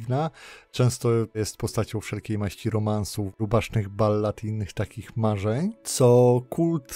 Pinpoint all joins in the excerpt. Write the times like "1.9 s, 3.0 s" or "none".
1.4 s, 3.2 s